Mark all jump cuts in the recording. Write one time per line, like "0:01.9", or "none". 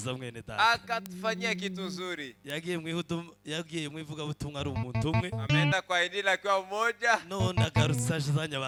none